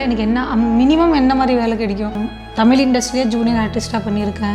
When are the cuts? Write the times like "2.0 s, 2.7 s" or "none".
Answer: 2.2 s